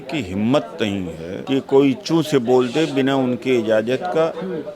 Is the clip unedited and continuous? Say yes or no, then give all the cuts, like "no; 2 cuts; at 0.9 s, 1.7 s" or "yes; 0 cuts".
no; 1 cut; at 1.4 s